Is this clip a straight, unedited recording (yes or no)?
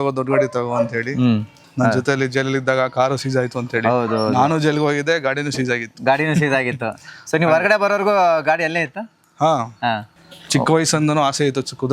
no